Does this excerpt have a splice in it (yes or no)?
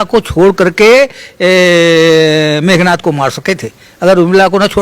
no